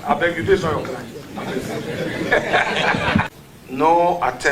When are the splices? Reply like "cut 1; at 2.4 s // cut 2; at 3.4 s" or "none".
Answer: cut 1; at 3.3 s